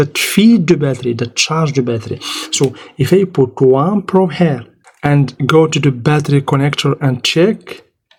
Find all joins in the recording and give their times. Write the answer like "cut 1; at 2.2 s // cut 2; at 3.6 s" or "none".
none